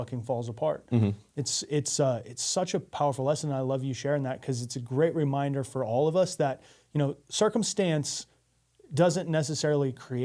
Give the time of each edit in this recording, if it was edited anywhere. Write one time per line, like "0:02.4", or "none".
none